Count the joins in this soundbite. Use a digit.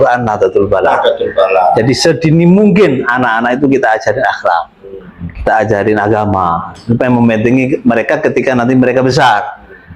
0